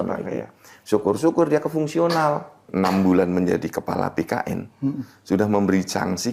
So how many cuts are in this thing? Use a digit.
1